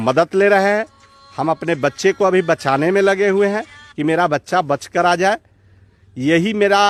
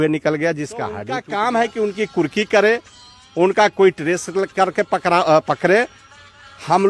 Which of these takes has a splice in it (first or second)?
second